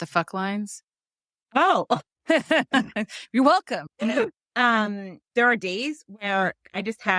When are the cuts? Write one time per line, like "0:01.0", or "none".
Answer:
0:04.4